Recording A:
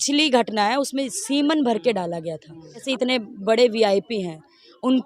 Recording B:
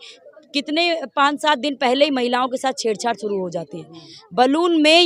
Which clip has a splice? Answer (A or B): A